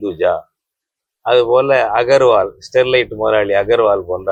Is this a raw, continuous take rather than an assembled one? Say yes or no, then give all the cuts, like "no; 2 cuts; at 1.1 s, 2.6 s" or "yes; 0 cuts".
yes; 0 cuts